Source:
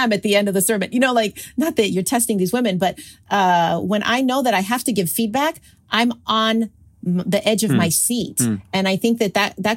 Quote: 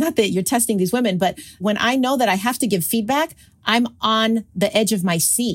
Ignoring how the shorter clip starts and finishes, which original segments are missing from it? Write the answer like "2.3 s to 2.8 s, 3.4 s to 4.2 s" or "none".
3.2 s to 3.8 s, 6.8 s to 7.2 s